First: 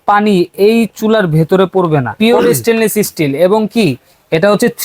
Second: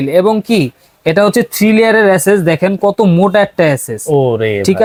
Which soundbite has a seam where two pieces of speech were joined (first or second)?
first